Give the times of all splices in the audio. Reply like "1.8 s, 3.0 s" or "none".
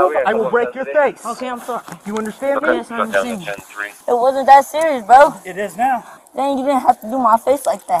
3.9 s, 6.1 s